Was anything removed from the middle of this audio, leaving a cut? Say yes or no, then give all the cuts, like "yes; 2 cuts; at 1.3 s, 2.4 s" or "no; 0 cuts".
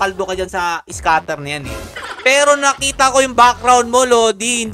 no; 0 cuts